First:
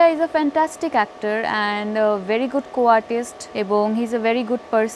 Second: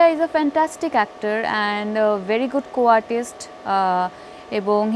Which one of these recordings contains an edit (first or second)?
first